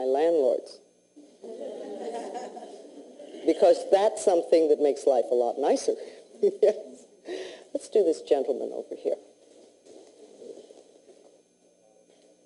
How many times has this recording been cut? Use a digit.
0